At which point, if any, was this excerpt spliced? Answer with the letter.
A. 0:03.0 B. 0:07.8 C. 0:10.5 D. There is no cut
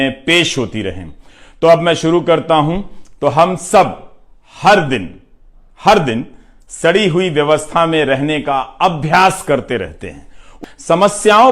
C